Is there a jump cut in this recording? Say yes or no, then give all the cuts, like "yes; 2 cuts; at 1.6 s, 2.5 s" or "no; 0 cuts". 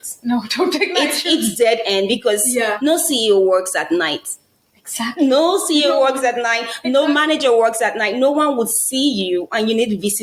no; 0 cuts